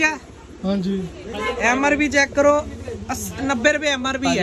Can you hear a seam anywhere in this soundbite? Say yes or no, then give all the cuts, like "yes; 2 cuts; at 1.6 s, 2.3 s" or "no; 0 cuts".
no; 0 cuts